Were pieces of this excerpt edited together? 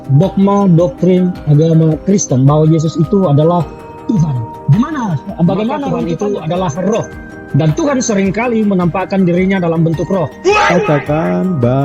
yes; 1 cut; at 6.0 s

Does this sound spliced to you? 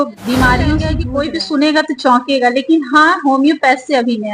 yes; 1 cut; at 1.0 s

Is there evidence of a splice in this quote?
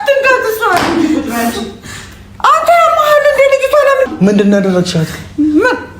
yes; 1 cut; at 4.0 s

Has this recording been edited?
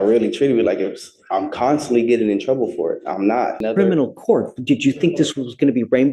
yes; 1 cut; at 3.6 s

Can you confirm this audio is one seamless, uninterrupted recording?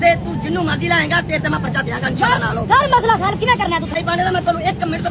yes; 0 cuts

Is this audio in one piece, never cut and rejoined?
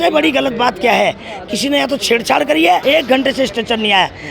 no; 1 cut; at 2.8 s

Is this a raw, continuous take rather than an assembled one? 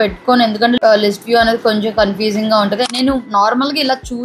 no; 1 cut; at 2.8 s

